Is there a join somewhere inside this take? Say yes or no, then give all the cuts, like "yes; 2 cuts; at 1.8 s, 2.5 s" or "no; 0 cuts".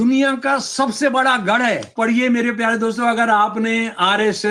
yes; 1 cut; at 1.9 s